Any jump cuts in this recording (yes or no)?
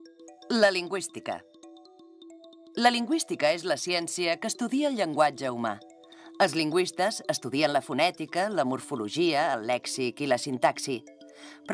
yes